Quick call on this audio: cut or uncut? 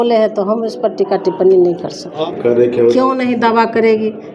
cut